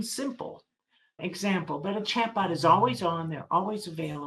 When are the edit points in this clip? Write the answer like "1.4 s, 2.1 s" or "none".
1.2 s